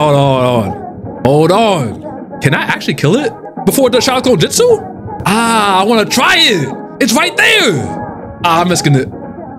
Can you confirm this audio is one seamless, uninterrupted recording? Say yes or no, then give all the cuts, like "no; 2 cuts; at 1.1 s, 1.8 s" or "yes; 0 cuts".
no; 2 cuts; at 2.3 s, 3.5 s